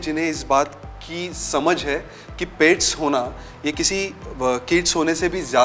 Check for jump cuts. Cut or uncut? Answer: uncut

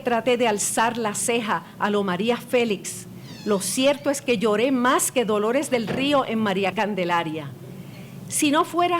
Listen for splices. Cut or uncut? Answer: cut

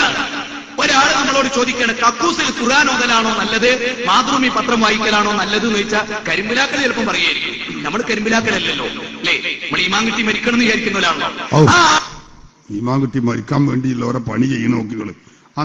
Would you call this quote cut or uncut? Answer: uncut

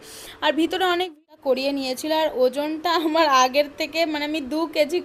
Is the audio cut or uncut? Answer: cut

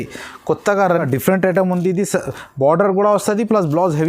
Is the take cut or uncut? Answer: cut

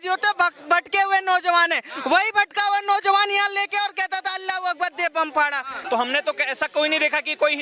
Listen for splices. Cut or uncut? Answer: cut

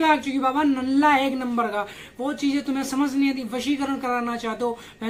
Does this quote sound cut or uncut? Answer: uncut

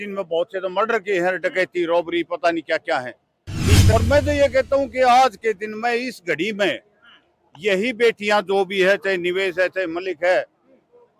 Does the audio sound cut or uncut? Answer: cut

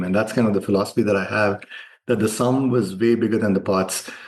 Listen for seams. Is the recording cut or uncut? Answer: uncut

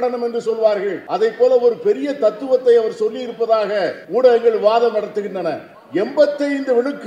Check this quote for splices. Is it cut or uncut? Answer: cut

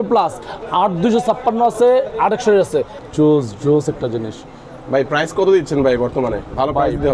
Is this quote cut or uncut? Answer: cut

